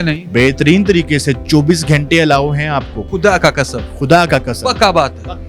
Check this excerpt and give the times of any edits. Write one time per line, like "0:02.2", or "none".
0:03.0